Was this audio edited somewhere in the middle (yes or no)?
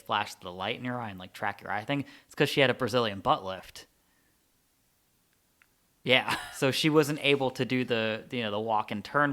yes